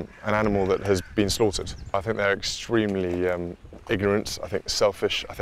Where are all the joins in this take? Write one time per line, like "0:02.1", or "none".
0:01.9